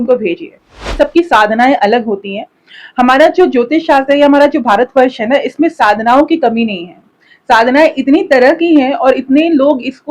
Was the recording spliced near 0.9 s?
yes; 1 cut; at 0.9 s

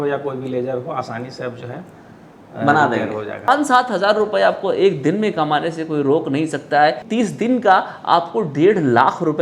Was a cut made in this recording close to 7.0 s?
yes; 2 cuts; at 3.5 s, 7.0 s

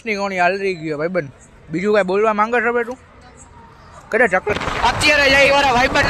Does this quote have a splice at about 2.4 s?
no; 1 cut; at 4.5 s

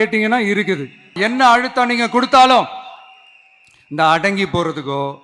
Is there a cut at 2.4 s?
no; 1 cut; at 1.2 s

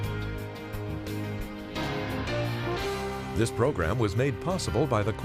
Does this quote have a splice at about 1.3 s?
no; 1 cut; at 3.4 s

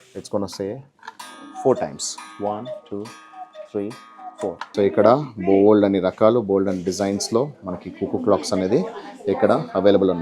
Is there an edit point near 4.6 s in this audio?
yes; 1 cut; at 4.6 s

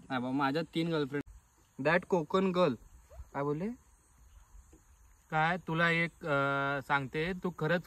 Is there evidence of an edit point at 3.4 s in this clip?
no; 1 cut; at 1.2 s

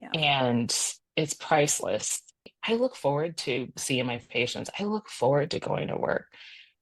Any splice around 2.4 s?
yes; 1 cut; at 2.4 s

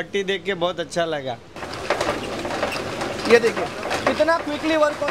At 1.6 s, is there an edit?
yes; 1 cut; at 1.6 s

